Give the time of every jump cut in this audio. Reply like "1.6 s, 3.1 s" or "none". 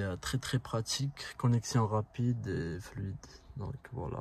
none